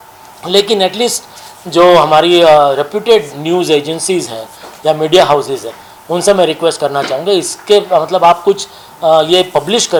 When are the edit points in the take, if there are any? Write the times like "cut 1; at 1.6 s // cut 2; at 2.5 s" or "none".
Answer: none

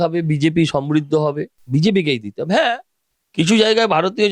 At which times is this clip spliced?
cut 1; at 1.5 s

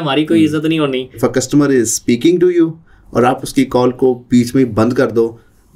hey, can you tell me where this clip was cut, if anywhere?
cut 1; at 1.2 s

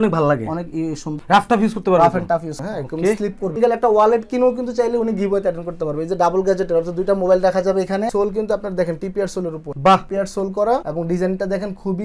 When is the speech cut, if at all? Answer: cut 1; at 1.1 s // cut 2; at 2.6 s // cut 3; at 3.5 s // cut 4; at 8.1 s

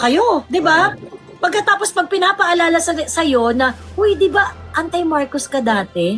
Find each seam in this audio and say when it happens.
none

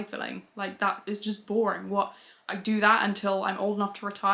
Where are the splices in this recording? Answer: none

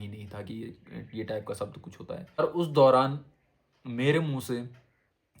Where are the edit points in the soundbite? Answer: cut 1; at 2.4 s

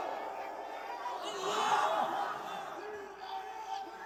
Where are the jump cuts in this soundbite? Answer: none

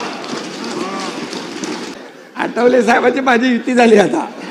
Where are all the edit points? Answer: cut 1; at 1.9 s

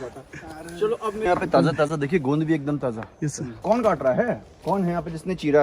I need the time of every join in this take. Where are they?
cut 1; at 1.3 s // cut 2; at 3.5 s // cut 3; at 4.5 s

